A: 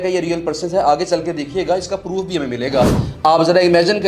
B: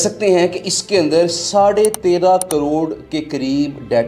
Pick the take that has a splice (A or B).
A